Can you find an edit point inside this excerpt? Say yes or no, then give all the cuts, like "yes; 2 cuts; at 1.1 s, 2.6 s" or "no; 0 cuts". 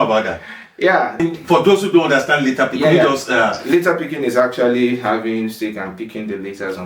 yes; 1 cut; at 1.2 s